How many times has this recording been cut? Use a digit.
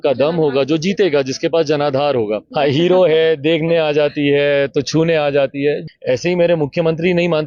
2